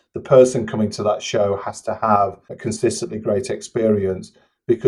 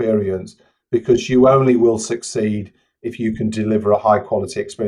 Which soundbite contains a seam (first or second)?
first